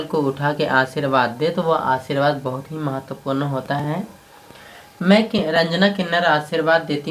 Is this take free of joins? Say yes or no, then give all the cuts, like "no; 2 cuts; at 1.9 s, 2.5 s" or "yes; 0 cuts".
yes; 0 cuts